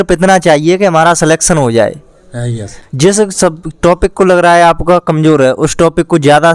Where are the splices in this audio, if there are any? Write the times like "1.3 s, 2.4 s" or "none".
2.8 s